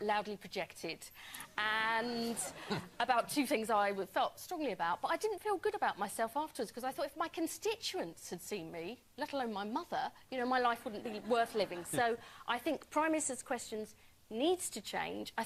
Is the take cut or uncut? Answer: uncut